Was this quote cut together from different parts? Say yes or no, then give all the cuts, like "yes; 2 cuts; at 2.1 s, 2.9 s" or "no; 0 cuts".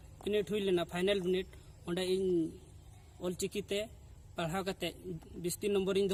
no; 0 cuts